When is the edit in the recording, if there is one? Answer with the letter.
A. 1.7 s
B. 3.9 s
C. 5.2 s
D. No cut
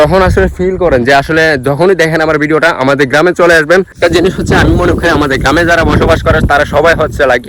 B